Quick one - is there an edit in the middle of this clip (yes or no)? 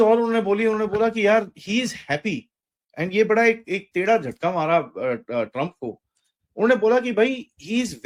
no